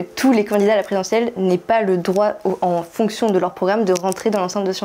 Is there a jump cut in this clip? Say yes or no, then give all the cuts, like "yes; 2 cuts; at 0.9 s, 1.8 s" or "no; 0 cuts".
no; 0 cuts